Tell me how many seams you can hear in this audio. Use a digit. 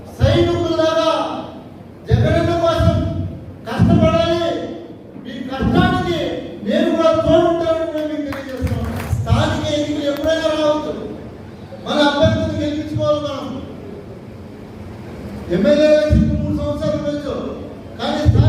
1